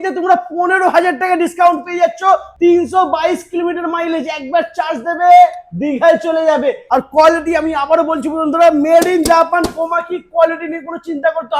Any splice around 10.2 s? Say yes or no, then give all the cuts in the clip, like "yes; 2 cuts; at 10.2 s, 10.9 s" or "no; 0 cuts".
no; 2 cuts; at 2.5 s, 6.8 s